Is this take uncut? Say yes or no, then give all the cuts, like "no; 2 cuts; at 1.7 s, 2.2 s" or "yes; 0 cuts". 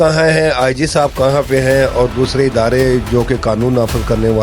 yes; 0 cuts